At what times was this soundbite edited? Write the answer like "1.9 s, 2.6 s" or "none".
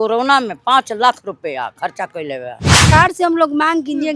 2.9 s